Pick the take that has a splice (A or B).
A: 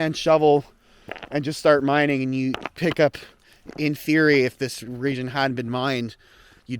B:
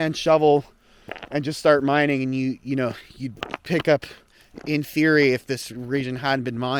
A